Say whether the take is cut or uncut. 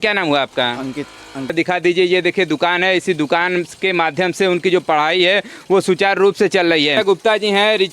cut